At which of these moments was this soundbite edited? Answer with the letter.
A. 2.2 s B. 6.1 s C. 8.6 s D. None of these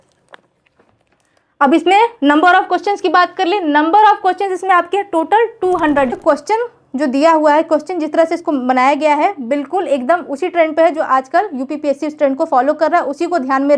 B